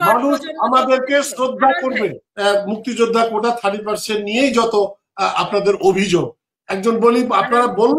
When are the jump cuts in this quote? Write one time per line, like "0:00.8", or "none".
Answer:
0:02.2